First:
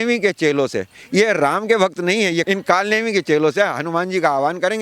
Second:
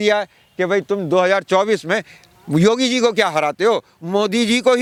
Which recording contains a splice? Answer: first; 1 cut; at 2.5 s

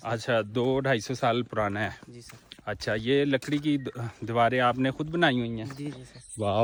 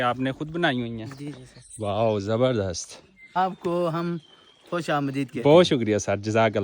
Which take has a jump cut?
second; 1 cut; at 3.2 s

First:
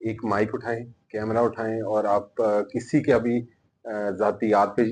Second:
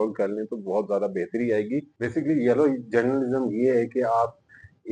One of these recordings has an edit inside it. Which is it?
second; 1 cut; at 1.9 s

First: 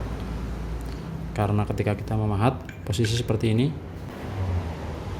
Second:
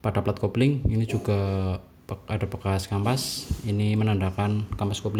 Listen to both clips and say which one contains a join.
first; 1 cut; at 4.1 s

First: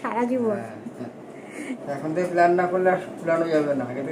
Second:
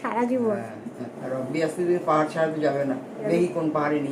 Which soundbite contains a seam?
second; 2 cuts; at 1.1 s, 3.2 s

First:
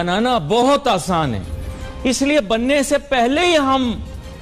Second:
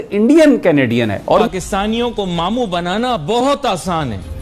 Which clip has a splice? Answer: second; 1 cut; at 1.5 s

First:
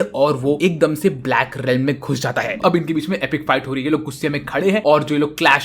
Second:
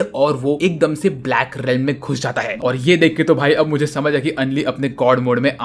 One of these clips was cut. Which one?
first; 1 cut; at 2.6 s

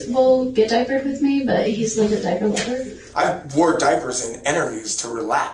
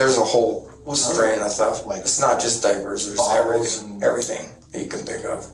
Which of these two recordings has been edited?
first; 1 cut; at 3.0 s

